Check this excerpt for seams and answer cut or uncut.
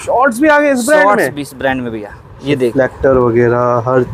uncut